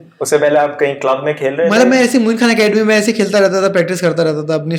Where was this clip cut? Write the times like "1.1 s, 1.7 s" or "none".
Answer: none